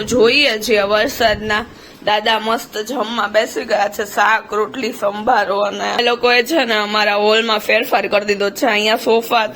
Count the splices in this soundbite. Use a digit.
1